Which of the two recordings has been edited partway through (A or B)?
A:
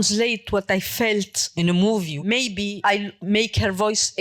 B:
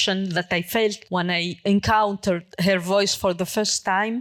A